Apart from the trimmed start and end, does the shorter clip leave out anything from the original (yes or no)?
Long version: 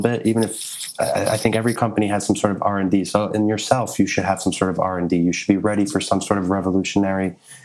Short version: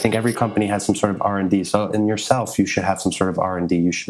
no